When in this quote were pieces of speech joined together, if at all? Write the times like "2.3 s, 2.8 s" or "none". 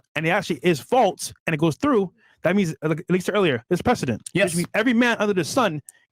none